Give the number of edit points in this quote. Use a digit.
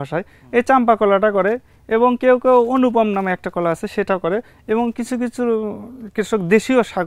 0